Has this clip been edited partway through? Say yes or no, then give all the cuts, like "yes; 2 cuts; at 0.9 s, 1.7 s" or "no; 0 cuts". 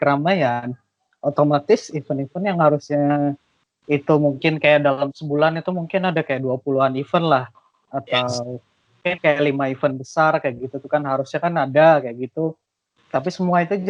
no; 0 cuts